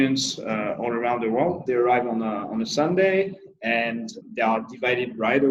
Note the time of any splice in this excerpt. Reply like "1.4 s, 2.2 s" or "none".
1.6 s, 4.2 s